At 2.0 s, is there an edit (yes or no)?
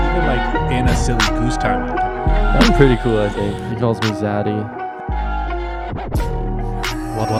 no